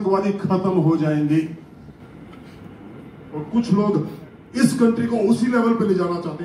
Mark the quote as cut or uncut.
cut